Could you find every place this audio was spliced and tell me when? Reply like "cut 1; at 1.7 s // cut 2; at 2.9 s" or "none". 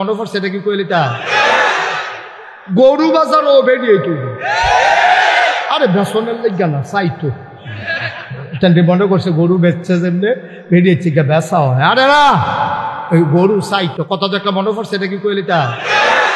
cut 1; at 2.6 s

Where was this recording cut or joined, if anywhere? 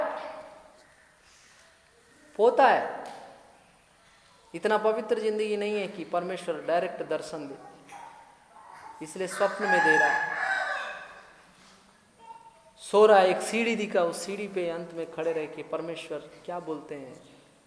none

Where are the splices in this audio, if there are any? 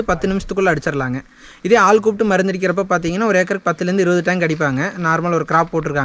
none

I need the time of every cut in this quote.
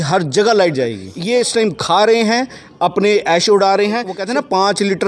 cut 1; at 1.1 s // cut 2; at 4.2 s

